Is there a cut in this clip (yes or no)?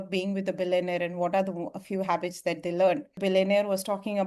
yes